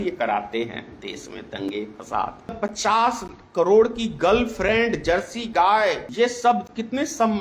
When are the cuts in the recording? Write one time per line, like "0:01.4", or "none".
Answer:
0:02.6
0:06.0